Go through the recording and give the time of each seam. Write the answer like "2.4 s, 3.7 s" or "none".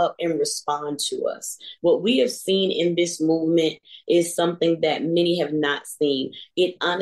none